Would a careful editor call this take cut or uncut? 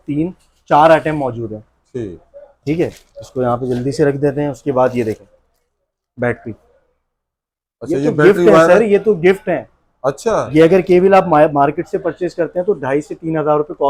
uncut